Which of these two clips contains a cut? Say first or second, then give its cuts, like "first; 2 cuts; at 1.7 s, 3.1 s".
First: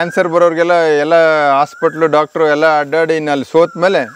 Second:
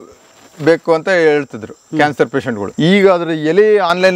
second; 1 cut; at 2.7 s